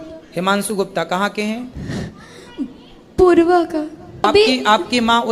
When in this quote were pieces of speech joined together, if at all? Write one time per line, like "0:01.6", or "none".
0:04.2